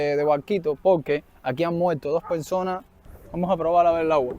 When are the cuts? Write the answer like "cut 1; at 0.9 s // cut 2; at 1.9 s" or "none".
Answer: cut 1; at 3.0 s